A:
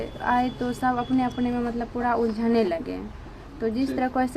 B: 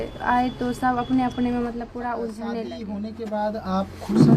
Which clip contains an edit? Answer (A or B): B